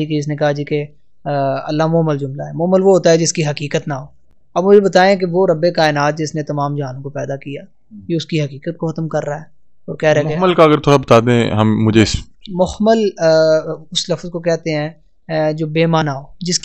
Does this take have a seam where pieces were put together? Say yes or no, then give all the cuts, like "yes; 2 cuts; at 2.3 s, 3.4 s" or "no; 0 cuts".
no; 0 cuts